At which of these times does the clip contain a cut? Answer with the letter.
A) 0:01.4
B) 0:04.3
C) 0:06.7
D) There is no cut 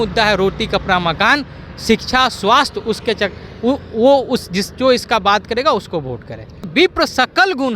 C